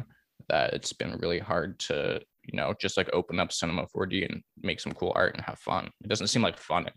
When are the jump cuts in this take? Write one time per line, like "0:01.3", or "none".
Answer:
0:02.4